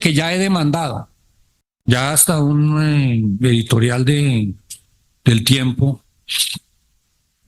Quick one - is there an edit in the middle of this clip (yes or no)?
yes